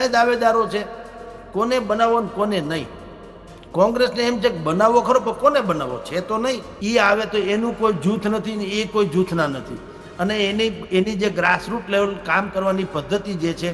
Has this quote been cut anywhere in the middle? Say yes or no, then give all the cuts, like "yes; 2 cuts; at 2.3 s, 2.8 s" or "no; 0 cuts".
yes; 1 cut; at 6.7 s